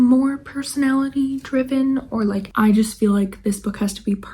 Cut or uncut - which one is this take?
cut